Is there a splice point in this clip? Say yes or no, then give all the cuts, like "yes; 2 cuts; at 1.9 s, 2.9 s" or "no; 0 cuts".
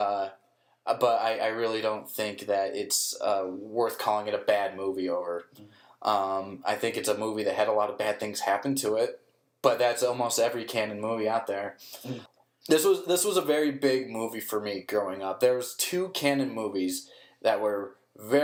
no; 0 cuts